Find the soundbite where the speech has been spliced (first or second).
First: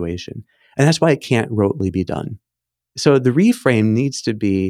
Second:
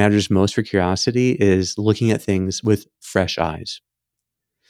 first